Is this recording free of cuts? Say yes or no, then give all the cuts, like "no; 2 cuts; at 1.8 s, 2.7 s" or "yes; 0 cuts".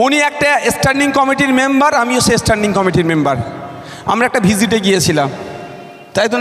yes; 0 cuts